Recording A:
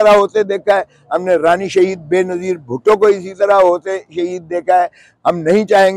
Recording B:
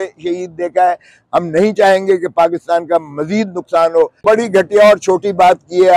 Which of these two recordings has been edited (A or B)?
B